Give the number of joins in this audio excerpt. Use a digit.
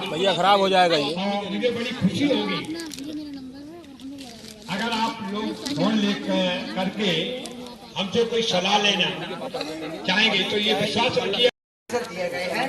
1